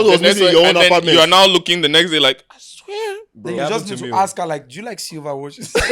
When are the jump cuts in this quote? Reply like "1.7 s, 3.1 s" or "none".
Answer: 3.6 s